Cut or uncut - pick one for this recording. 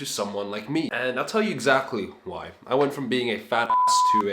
uncut